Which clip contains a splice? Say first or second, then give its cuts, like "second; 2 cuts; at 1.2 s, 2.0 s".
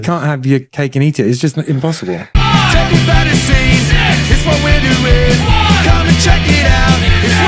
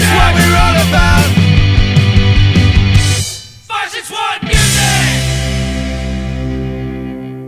first; 1 cut; at 2.3 s